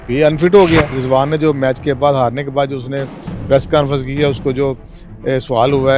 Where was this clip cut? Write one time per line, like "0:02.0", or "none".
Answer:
0:01.0